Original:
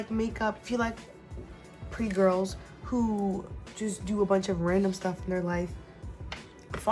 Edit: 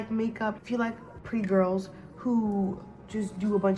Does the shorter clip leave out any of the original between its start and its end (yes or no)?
yes